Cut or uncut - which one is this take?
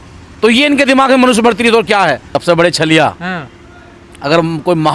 cut